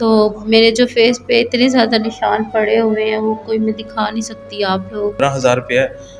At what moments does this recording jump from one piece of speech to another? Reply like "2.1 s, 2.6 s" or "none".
5.2 s